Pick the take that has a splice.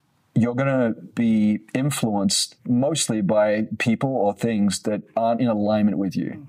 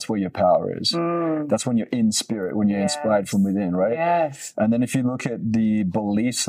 first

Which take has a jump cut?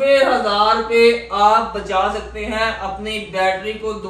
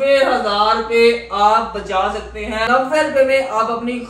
second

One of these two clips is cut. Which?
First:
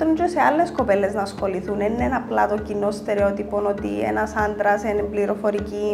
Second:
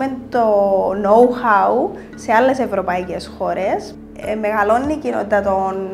second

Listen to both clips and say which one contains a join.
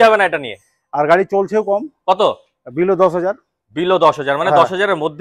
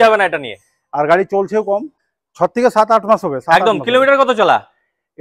second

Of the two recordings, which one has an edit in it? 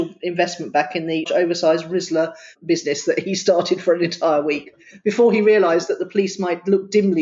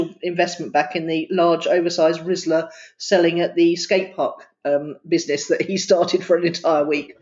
first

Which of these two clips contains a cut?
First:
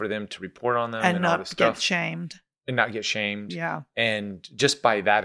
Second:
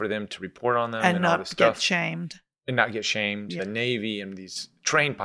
second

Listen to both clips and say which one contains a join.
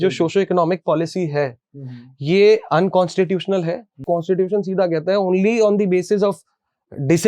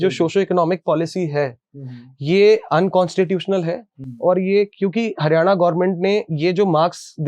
first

